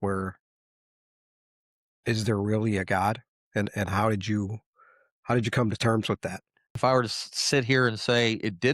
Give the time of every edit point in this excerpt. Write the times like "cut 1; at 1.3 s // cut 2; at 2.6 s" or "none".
cut 1; at 6.7 s